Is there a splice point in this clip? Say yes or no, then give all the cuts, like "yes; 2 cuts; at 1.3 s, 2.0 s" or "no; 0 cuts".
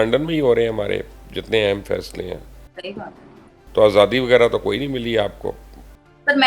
no; 0 cuts